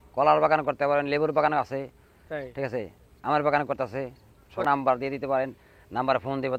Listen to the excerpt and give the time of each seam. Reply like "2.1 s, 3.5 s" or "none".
4.6 s